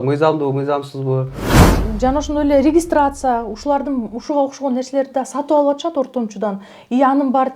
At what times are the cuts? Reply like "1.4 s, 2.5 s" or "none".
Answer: 1.6 s